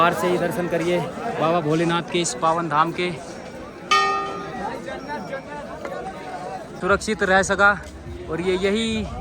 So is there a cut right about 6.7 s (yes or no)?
yes